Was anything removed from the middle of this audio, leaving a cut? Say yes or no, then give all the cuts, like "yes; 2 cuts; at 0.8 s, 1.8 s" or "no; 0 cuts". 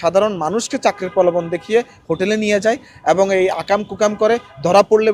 no; 0 cuts